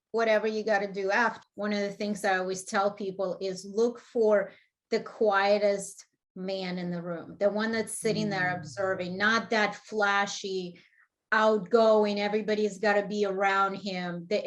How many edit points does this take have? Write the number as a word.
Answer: one